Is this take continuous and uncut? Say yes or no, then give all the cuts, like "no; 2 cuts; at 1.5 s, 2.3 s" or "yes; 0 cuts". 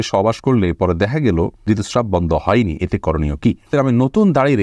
no; 2 cuts; at 1.6 s, 3.6 s